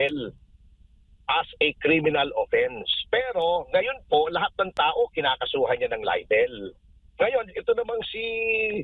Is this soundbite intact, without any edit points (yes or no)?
yes